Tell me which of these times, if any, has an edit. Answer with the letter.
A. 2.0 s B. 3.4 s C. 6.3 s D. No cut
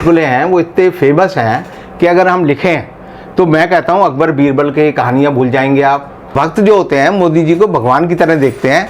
C